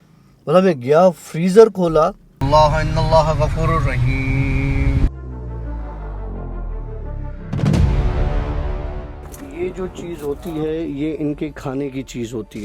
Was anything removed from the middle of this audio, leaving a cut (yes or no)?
yes